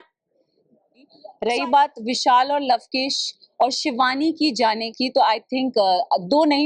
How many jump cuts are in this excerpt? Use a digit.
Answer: 1